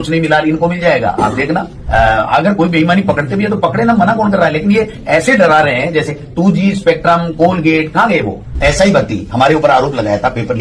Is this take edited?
yes; 2 cuts; at 1.8 s, 8.4 s

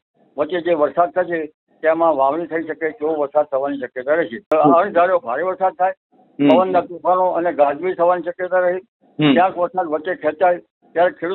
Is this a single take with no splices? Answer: no; 1 cut; at 4.5 s

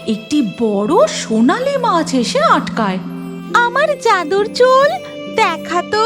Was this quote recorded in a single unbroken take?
no; 1 cut; at 3.0 s

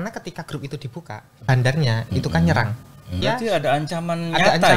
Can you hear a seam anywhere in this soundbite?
yes; 2 cuts; at 1.4 s, 3.2 s

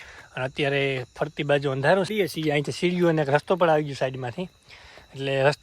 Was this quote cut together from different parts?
yes; 1 cut; at 2.1 s

